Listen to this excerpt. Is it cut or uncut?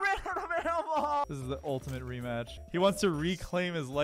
cut